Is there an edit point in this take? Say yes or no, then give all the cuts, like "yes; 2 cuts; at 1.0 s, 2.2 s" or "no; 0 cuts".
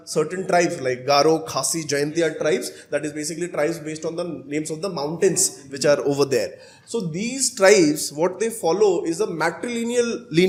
no; 0 cuts